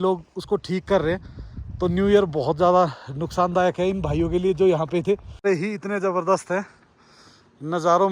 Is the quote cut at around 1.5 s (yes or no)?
no